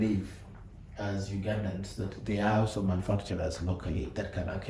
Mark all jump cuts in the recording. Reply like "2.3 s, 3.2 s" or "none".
none